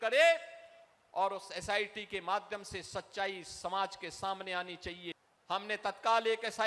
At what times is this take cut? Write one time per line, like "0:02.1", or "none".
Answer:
0:05.1